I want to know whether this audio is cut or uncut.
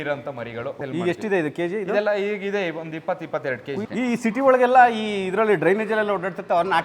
cut